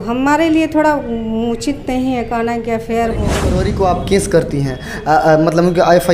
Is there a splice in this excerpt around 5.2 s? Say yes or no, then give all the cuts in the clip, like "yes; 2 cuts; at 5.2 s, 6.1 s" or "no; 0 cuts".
no; 1 cut; at 3.5 s